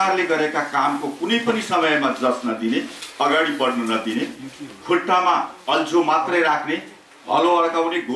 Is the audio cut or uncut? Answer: uncut